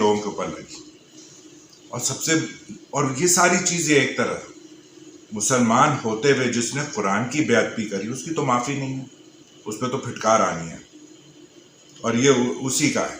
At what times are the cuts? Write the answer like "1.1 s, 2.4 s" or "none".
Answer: none